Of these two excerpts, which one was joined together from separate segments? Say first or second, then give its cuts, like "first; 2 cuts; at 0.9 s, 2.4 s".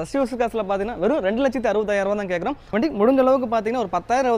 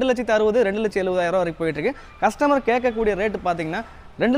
first; 1 cut; at 2.6 s